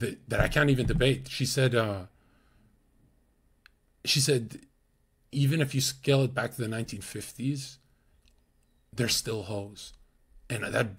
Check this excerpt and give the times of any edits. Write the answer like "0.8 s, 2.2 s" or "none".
none